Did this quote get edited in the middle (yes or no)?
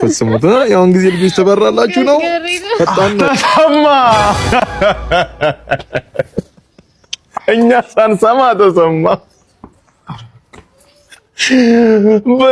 yes